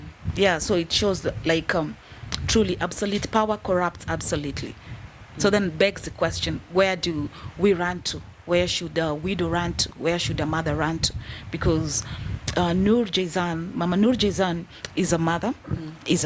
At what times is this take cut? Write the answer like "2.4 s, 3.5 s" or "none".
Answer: none